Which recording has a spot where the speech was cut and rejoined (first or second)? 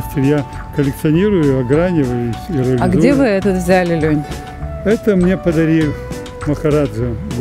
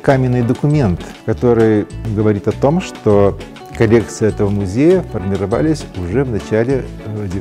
second